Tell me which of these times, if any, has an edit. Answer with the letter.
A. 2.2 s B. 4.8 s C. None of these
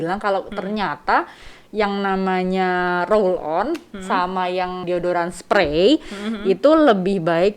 B